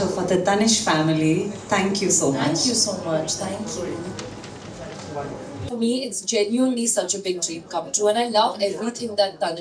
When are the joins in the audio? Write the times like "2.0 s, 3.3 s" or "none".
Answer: 5.5 s